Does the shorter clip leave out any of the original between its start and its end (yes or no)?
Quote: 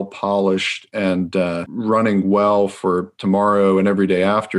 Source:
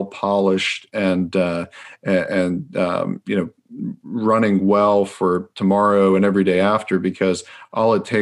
yes